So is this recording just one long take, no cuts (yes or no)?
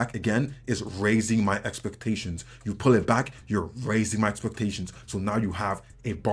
yes